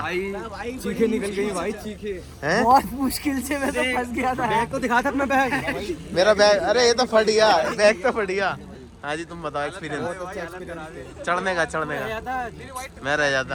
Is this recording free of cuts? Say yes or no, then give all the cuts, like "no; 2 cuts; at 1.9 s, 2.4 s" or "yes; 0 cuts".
yes; 0 cuts